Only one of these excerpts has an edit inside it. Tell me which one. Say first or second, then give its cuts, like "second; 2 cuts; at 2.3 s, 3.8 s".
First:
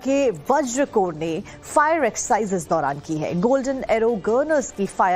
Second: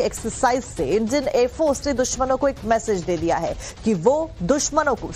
first; 1 cut; at 3.3 s